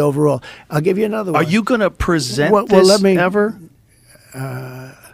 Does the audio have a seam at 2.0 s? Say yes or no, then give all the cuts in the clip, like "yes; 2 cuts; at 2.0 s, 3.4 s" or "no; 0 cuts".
no; 0 cuts